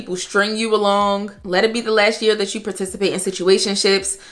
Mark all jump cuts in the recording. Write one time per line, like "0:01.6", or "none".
none